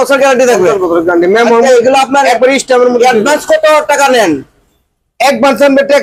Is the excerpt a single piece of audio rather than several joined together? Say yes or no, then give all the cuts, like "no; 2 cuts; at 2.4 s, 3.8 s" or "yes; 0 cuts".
yes; 0 cuts